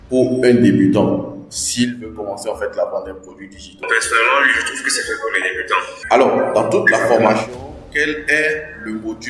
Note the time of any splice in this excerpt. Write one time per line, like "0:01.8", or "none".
0:03.8
0:05.9

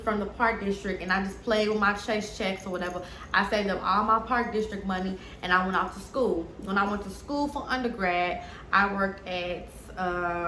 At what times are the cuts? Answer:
none

